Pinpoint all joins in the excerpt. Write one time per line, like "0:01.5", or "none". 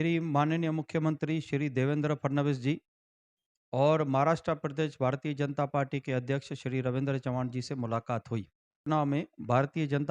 0:08.9